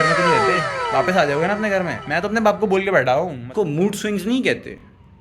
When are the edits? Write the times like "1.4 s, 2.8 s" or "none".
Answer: 3.4 s